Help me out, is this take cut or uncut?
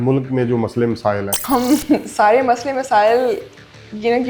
cut